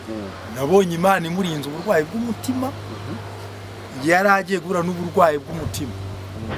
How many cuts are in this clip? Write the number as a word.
zero